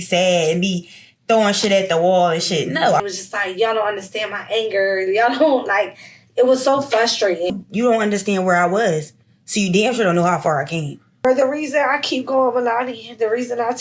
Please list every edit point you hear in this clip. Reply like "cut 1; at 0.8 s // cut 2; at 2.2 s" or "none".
cut 1; at 3.0 s // cut 2; at 7.5 s // cut 3; at 11.2 s